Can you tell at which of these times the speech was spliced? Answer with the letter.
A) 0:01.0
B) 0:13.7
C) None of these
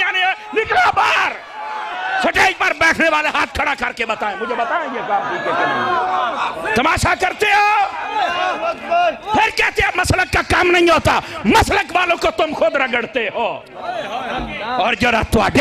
C